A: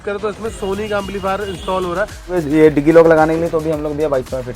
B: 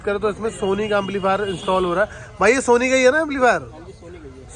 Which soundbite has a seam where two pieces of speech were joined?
A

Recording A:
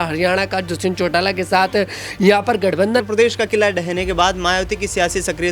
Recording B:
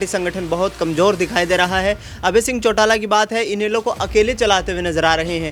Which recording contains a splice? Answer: A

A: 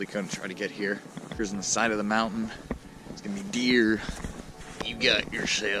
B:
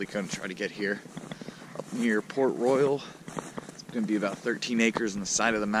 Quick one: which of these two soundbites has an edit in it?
A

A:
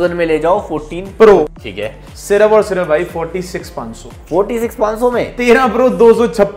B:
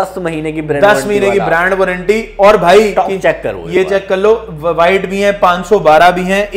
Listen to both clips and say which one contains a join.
A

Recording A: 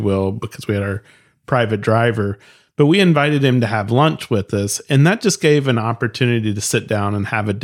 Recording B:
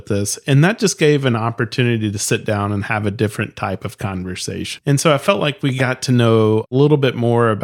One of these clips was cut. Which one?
B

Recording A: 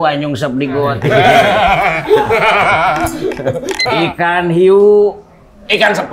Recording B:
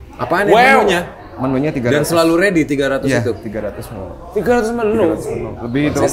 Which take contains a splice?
A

